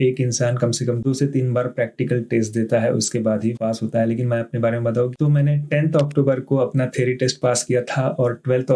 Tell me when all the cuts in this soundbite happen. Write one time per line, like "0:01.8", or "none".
none